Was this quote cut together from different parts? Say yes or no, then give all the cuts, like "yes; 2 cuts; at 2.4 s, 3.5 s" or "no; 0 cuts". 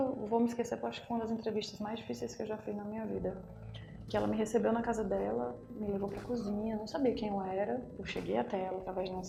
no; 0 cuts